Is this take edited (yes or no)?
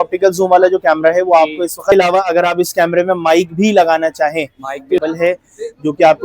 yes